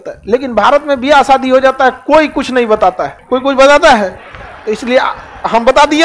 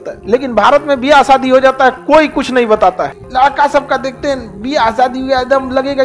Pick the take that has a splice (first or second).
second